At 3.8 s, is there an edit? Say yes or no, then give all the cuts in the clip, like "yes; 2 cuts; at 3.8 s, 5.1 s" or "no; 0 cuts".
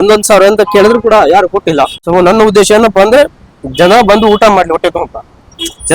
no; 1 cut; at 2.0 s